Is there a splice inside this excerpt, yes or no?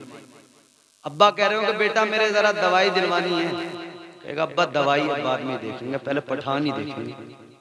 no